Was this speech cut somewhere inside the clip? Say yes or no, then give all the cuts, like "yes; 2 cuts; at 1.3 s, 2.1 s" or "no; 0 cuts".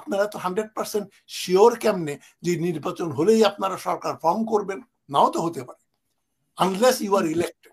no; 0 cuts